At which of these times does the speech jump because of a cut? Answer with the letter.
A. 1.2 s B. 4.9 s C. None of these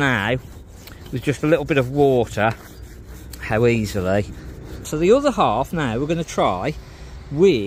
B